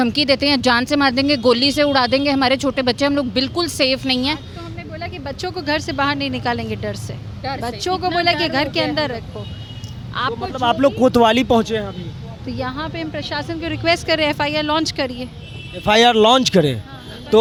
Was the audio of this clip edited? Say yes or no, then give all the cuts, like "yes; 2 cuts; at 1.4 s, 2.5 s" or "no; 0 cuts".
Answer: no; 0 cuts